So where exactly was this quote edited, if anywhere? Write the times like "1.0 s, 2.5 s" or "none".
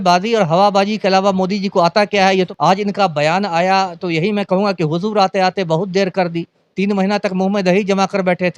none